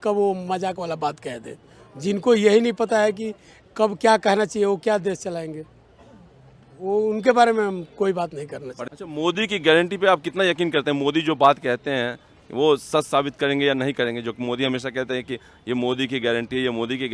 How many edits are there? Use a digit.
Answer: 1